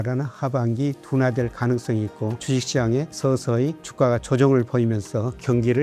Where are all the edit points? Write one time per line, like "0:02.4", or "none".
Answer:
none